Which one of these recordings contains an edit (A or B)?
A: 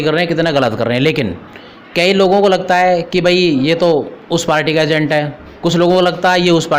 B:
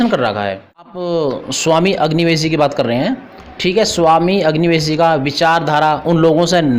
B